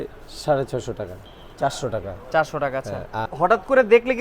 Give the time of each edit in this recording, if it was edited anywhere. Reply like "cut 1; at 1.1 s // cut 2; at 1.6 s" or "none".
cut 1; at 1.2 s // cut 2; at 3.2 s